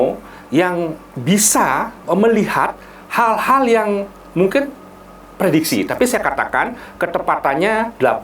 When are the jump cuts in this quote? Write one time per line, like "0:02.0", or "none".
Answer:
0:01.1